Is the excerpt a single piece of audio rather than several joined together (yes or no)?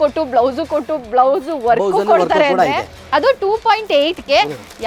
yes